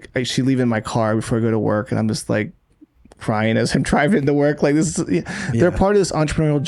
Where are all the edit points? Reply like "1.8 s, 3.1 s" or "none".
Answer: none